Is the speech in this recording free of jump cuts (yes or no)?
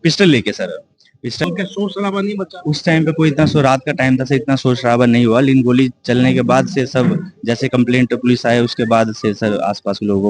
no